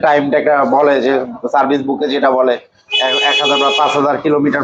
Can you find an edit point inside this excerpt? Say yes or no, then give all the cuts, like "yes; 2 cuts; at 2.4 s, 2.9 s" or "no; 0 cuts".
no; 0 cuts